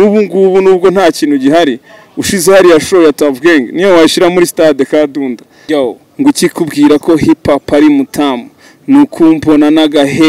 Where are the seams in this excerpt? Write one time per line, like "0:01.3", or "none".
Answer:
0:05.5